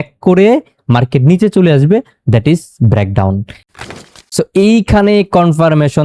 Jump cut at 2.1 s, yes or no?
no